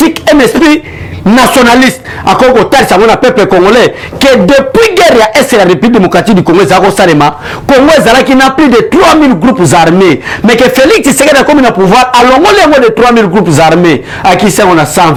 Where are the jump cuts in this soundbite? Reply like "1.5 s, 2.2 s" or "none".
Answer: none